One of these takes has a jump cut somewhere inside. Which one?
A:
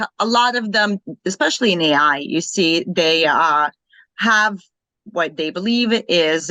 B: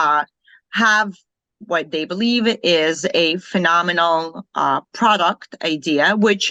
A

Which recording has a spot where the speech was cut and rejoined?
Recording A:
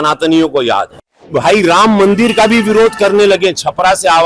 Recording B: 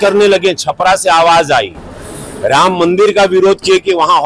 A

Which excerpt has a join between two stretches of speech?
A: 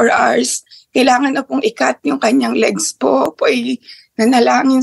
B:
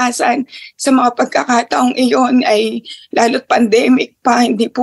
A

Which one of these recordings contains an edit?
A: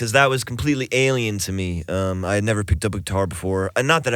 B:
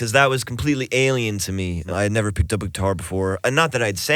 B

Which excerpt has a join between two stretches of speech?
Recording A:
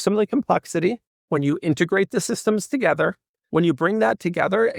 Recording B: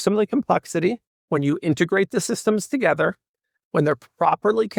A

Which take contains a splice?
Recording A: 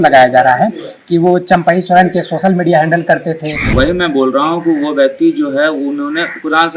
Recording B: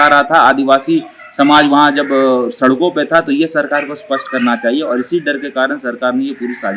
A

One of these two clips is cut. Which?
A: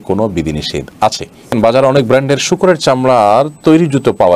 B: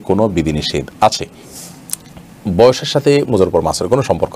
A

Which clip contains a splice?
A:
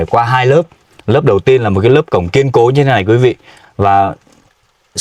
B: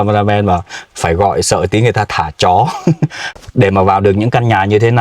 B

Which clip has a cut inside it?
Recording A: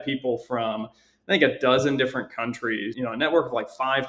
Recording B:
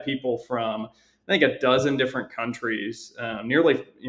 A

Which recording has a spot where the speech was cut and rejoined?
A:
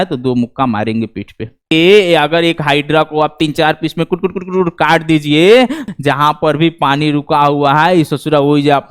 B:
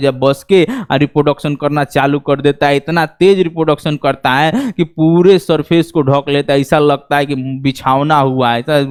A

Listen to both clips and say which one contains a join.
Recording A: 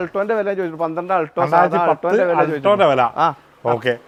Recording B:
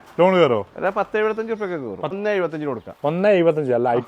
B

